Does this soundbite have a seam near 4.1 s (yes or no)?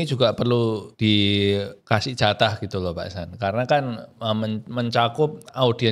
no